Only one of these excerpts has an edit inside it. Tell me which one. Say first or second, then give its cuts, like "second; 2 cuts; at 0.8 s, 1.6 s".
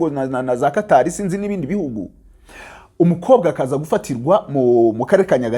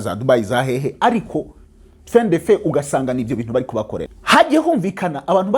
second; 1 cut; at 4.1 s